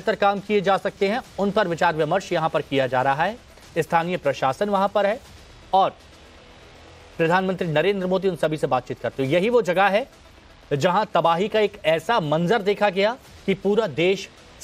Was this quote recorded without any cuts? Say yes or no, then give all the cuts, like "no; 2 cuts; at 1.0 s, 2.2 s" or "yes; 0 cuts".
no; 1 cut; at 8.9 s